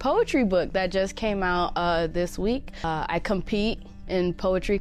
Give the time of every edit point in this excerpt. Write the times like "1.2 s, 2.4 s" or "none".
2.8 s